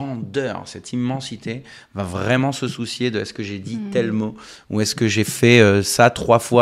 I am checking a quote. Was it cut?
no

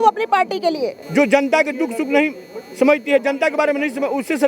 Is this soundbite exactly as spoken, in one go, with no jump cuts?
no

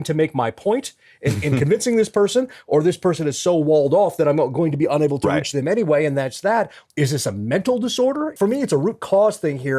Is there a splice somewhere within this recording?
yes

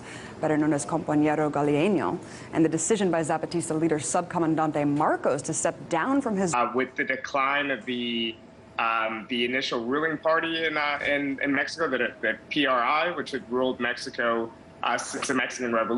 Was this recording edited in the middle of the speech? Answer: no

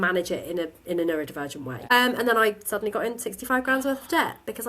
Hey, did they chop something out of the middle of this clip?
yes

